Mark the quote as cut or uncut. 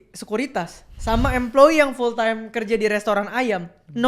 uncut